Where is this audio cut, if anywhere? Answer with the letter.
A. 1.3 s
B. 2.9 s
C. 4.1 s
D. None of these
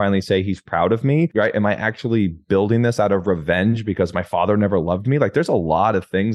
A